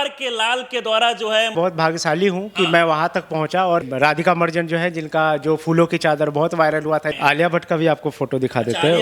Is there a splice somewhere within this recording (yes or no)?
yes